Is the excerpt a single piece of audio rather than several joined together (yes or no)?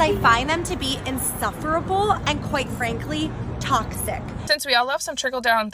no